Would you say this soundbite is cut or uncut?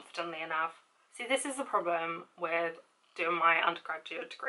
cut